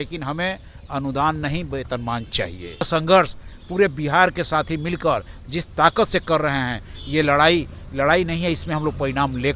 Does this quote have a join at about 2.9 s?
yes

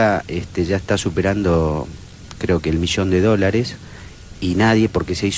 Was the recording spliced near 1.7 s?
no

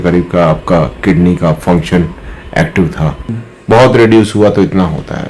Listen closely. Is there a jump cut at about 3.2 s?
yes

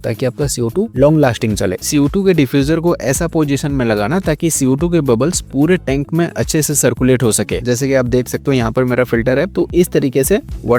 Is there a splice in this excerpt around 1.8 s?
yes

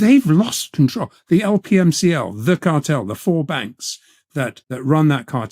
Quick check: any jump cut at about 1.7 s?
no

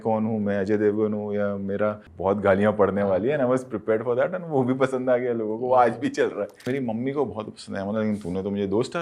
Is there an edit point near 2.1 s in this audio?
yes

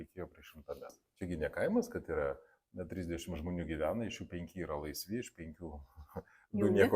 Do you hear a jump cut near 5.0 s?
no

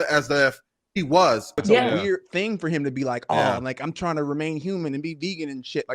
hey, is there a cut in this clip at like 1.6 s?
yes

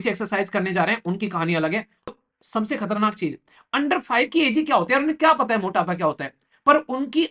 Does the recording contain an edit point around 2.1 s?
yes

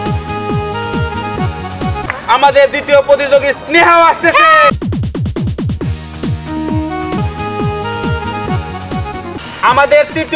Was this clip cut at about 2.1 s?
yes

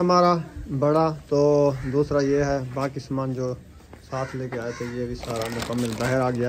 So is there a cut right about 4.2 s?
no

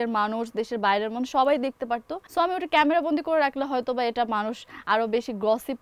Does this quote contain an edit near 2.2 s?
yes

